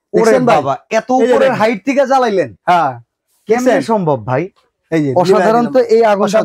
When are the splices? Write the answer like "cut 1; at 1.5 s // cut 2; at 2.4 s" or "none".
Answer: none